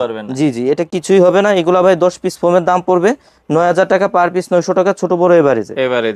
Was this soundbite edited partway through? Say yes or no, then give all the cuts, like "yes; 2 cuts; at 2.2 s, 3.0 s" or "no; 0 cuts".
no; 0 cuts